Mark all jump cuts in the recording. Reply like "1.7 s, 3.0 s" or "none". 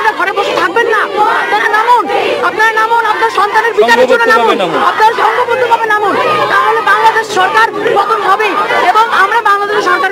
none